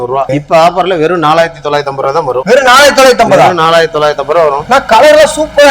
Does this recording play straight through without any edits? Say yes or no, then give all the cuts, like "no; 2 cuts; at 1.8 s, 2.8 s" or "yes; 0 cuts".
yes; 0 cuts